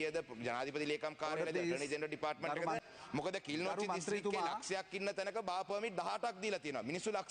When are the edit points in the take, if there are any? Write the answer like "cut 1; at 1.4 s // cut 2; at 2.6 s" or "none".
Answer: cut 1; at 2.8 s